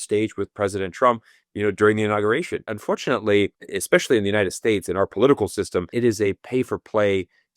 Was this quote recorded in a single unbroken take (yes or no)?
no